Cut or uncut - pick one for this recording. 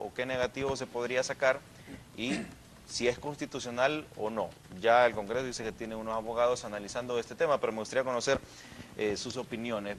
uncut